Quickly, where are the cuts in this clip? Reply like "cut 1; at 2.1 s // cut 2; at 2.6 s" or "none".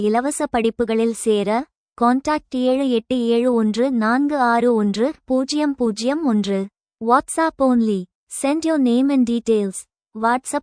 none